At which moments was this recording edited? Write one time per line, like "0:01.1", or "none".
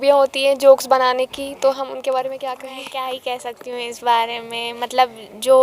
0:02.7